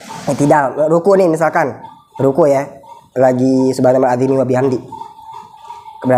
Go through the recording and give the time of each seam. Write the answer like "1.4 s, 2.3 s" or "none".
none

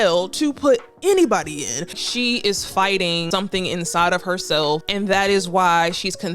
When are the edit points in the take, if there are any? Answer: 2.0 s, 3.2 s, 4.9 s

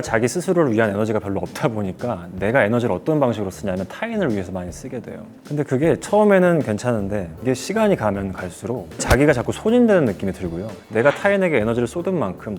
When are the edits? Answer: none

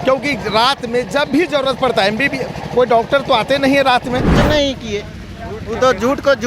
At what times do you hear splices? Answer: 4.4 s

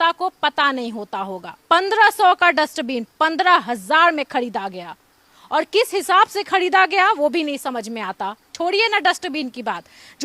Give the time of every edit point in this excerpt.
1.6 s, 8.5 s

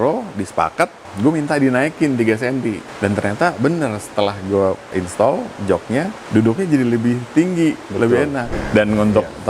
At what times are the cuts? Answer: 1.1 s, 2.9 s, 4.9 s, 6.2 s, 8.5 s

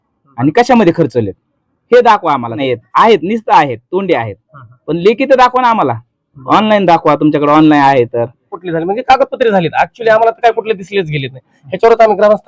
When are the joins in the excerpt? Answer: 2.6 s, 8.5 s

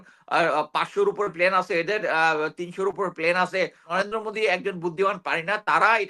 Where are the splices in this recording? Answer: 3.8 s

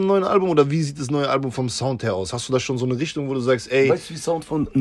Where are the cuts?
none

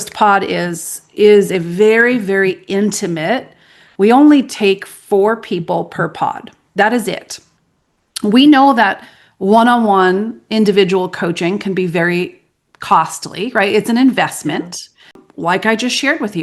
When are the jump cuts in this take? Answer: 15.3 s

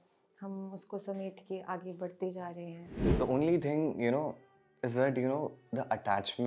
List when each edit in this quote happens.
3.0 s

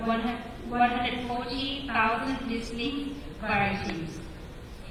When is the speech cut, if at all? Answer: none

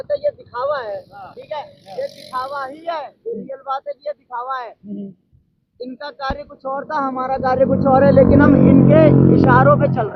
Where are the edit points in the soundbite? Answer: none

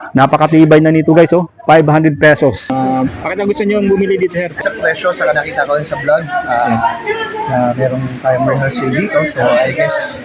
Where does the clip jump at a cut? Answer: 2.7 s, 4.6 s

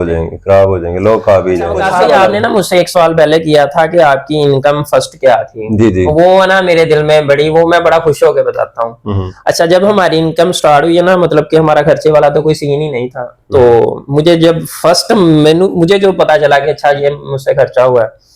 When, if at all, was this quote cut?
1.9 s

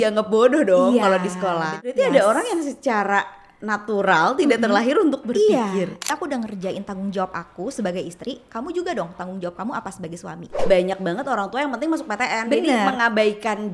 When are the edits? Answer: 1.8 s, 6.1 s, 10.6 s

